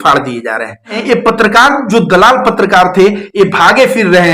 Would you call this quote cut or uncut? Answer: cut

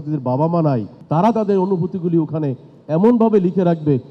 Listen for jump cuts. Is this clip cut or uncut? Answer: cut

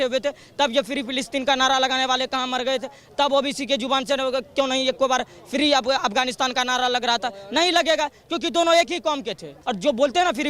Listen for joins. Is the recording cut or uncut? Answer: cut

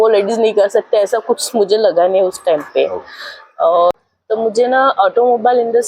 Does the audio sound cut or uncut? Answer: cut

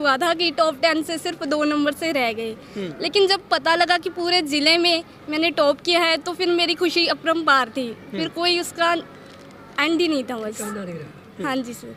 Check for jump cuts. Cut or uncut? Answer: uncut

